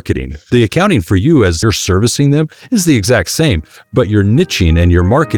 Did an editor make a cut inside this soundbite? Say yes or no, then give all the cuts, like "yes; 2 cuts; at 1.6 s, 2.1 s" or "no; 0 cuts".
yes; 1 cut; at 1.6 s